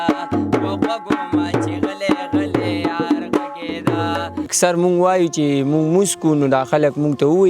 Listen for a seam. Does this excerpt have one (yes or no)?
yes